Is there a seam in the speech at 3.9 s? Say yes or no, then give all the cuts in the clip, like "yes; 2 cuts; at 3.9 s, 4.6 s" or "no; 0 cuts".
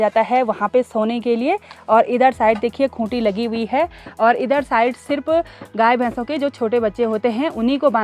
no; 0 cuts